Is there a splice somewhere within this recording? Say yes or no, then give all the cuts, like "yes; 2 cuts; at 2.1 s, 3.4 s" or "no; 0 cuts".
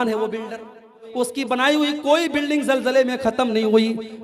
yes; 1 cut; at 1.0 s